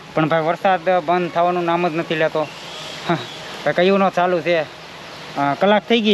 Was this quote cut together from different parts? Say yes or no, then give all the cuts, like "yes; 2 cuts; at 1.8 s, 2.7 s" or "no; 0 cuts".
no; 0 cuts